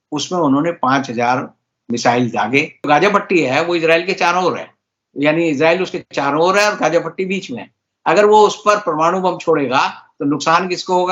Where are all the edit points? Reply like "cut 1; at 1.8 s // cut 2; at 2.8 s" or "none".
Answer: cut 1; at 2.8 s